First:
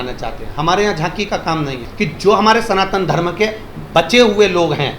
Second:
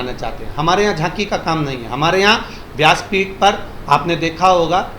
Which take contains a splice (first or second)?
first